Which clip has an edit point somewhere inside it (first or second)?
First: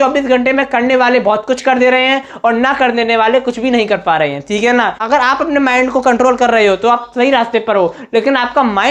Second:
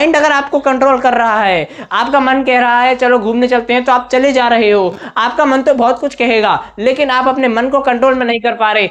first